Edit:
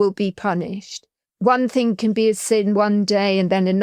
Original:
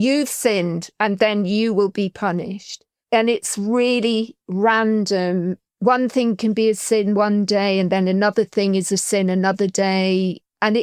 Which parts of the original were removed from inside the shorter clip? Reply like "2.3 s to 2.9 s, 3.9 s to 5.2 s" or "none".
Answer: 3.0 s to 5.6 s